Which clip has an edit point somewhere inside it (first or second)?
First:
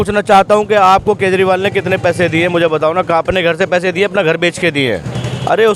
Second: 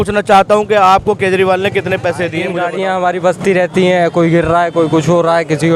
second